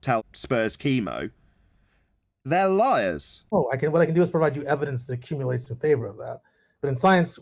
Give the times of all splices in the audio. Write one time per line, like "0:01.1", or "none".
none